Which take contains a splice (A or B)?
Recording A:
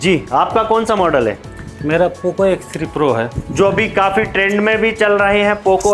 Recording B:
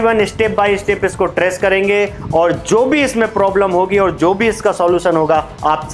A